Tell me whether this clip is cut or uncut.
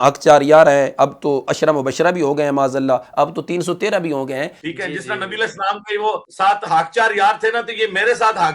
cut